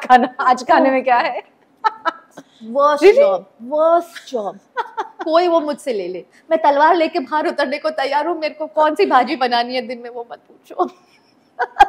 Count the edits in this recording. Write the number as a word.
zero